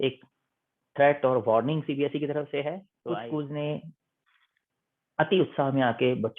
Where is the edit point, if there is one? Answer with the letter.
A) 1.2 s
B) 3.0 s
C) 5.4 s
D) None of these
B